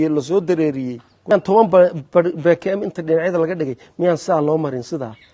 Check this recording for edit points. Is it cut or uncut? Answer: cut